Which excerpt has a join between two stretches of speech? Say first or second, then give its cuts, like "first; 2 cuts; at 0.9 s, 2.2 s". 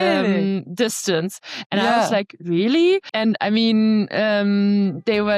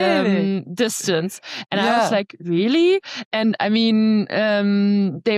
first; 1 cut; at 3.1 s